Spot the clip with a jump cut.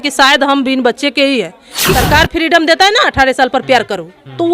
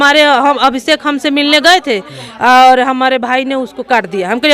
first; 1 cut; at 1.9 s

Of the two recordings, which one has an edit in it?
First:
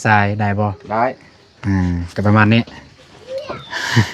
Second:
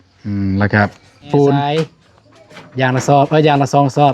second; 1 cut; at 1.7 s

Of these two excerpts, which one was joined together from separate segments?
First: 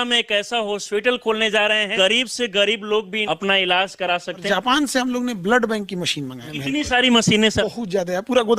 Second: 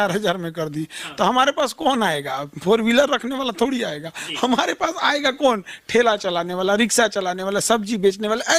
first; 5 cuts; at 1.9 s, 3.2 s, 4.4 s, 6.5 s, 7.6 s

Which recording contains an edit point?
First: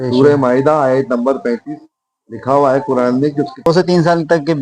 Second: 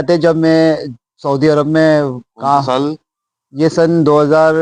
first; 1 cut; at 3.7 s

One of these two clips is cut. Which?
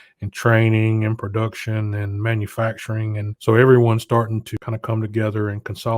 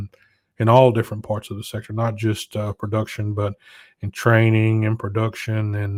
first; 2 cuts; at 3.3 s, 4.5 s

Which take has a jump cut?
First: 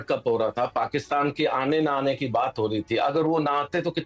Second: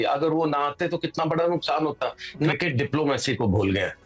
second; 1 cut; at 2.5 s

